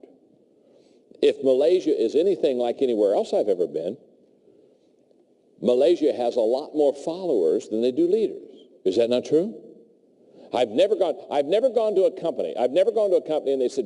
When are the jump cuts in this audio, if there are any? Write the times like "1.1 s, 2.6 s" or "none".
9.2 s